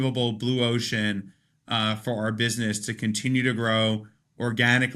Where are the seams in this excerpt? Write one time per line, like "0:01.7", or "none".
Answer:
none